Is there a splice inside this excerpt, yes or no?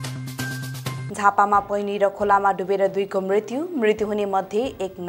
yes